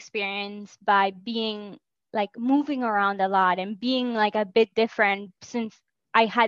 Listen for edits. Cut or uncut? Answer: uncut